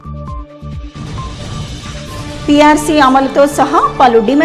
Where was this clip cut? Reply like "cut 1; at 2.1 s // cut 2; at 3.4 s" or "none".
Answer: none